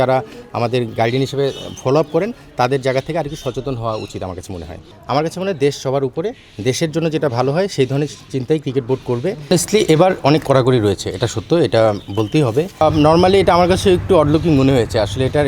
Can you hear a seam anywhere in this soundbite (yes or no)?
yes